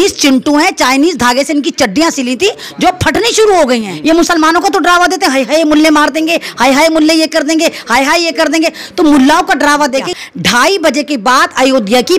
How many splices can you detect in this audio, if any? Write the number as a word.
two